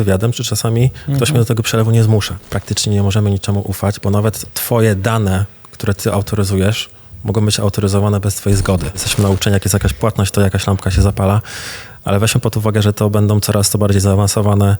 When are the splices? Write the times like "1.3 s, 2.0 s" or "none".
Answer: 2.5 s, 4.5 s, 9.1 s